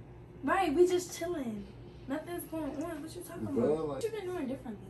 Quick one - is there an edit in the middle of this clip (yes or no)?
yes